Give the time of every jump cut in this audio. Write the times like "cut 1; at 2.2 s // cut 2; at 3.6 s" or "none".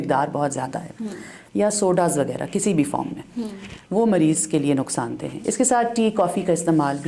cut 1; at 5.3 s